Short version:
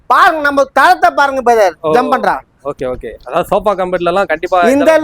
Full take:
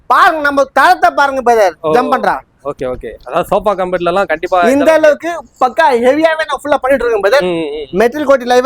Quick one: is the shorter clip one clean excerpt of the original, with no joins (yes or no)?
yes